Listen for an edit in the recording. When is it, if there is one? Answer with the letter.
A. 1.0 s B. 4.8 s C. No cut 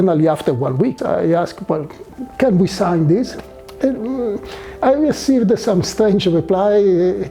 A